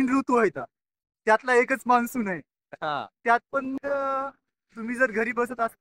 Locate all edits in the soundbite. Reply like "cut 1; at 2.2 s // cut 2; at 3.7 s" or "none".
none